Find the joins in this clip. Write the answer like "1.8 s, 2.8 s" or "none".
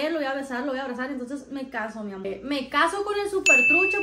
2.2 s